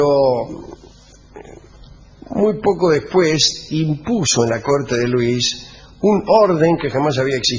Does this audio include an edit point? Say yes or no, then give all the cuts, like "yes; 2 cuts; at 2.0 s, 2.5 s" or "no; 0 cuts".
yes; 1 cut; at 3.7 s